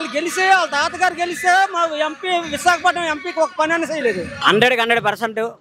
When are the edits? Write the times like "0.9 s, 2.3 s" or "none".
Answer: 4.4 s

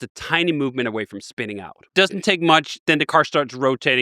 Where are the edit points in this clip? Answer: 1.9 s

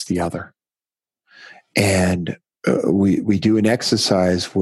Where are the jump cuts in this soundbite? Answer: 2.4 s

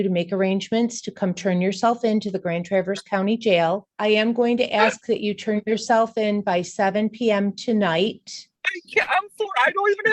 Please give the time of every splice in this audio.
3.9 s

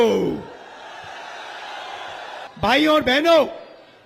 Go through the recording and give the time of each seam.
2.5 s

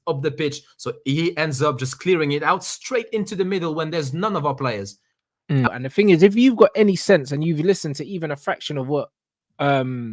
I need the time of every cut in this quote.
5.7 s

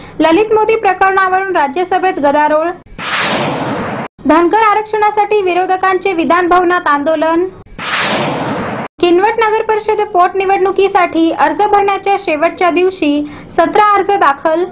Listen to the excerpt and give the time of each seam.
none

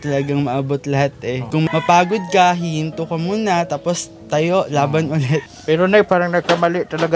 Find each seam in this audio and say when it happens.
1.4 s, 5.5 s

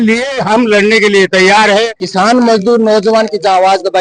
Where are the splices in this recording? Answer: 2.0 s

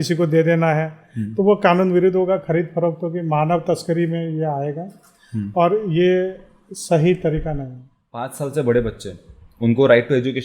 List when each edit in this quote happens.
8.3 s

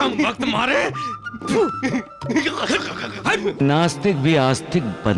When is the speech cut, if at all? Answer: 3.6 s

